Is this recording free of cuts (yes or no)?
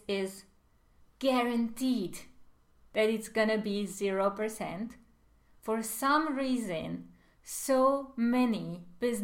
yes